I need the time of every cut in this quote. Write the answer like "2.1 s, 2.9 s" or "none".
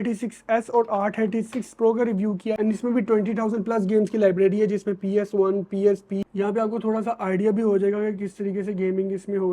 2.5 s, 6.3 s